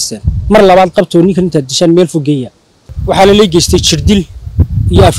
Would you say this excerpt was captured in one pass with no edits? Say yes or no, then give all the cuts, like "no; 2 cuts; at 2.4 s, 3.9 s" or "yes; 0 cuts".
yes; 0 cuts